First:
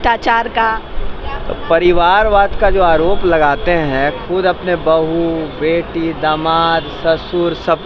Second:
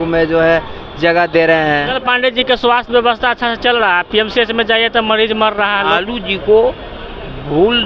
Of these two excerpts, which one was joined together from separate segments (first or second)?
second